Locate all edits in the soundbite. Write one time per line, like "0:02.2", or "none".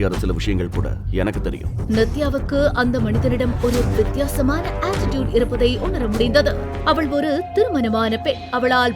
none